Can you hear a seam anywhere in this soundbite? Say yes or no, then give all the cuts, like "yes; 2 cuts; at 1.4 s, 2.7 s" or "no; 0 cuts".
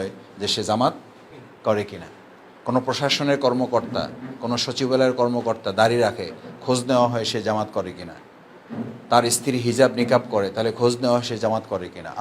no; 0 cuts